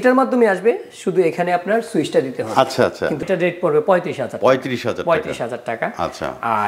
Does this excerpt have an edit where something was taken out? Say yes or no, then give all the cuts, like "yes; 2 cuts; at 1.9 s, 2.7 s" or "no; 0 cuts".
yes; 1 cut; at 3.2 s